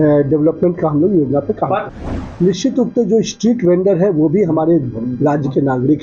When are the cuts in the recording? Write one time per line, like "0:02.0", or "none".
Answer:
0:01.9